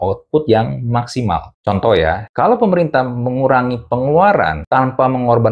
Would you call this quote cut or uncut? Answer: cut